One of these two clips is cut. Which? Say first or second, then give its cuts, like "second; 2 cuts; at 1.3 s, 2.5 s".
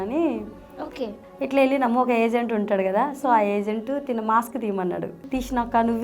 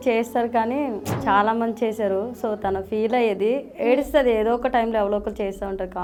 first; 2 cuts; at 1.1 s, 5.2 s